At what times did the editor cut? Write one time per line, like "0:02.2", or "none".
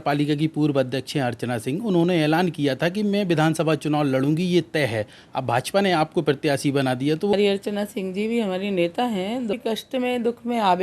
0:07.3
0:09.5